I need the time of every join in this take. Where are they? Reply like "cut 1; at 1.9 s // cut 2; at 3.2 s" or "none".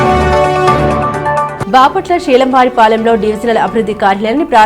cut 1; at 1.4 s